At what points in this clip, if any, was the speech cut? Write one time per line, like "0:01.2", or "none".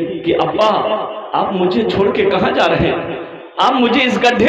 none